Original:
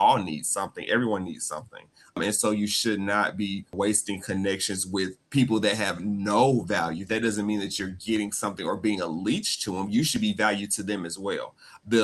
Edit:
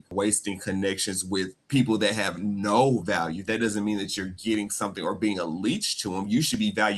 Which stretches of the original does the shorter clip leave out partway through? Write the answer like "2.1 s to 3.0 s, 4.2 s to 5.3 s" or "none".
none

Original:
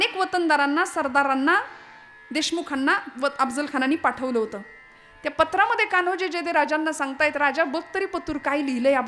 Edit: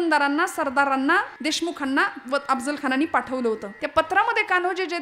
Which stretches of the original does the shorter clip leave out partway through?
1.7 s to 2.2 s, 4.6 s to 5.2 s

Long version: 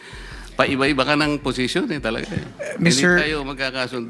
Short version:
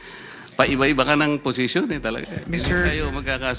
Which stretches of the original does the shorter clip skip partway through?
2.3 s to 2.7 s

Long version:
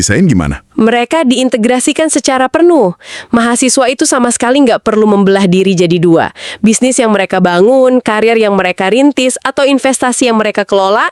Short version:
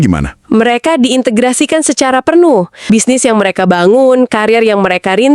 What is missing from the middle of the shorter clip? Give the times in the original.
3.0 s to 6.5 s

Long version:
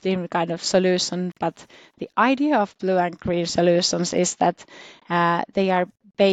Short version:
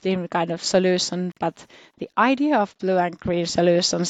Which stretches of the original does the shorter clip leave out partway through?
none

